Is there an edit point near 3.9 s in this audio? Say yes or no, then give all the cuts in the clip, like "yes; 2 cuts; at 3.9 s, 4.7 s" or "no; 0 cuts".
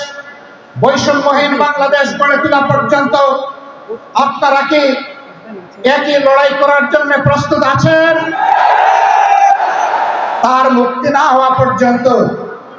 no; 1 cut; at 10.3 s